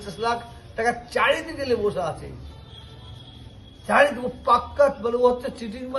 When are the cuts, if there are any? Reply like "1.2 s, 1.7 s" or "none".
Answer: none